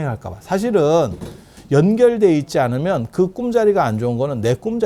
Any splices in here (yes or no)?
no